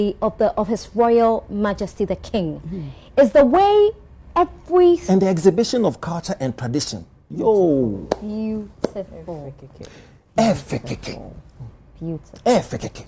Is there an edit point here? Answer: yes; 1 cut; at 5.0 s

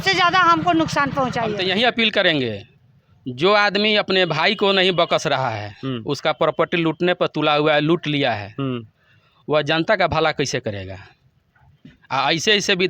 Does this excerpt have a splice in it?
yes; 1 cut; at 1.6 s

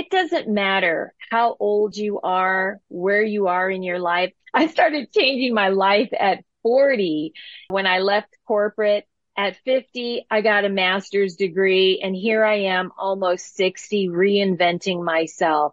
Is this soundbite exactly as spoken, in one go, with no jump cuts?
no; 2 cuts; at 4.4 s, 7.7 s

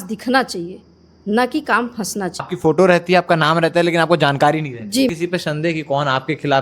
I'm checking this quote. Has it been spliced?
yes; 2 cuts; at 2.5 s, 5.1 s

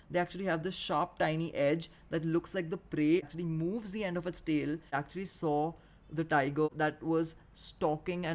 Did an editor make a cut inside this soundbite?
yes; 3 cuts; at 3.3 s, 4.9 s, 6.7 s

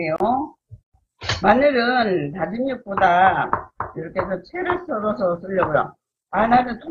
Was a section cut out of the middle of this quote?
no; 0 cuts

